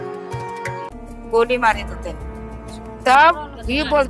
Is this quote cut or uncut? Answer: cut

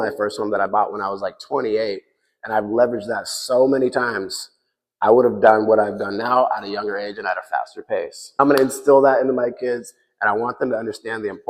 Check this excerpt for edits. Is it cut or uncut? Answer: cut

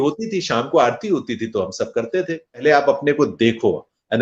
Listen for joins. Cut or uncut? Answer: cut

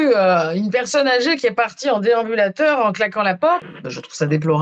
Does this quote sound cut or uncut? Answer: cut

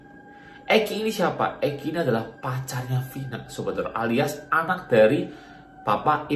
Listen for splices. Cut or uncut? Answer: uncut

